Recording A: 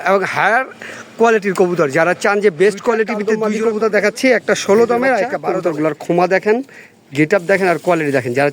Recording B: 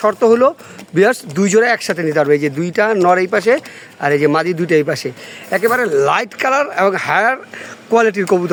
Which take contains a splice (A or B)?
A